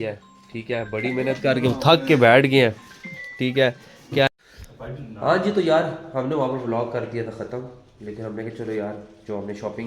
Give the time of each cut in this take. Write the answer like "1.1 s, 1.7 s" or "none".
4.3 s